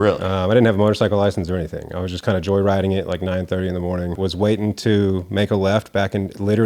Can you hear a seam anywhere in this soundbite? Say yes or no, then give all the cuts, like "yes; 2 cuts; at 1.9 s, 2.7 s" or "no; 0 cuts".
yes; 1 cut; at 4.2 s